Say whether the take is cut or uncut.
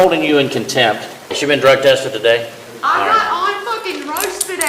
cut